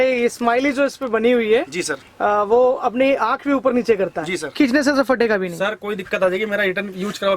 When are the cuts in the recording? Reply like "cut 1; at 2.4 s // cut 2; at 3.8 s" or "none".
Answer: cut 1; at 4.5 s